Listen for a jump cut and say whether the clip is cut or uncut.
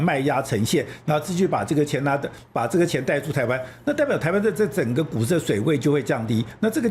uncut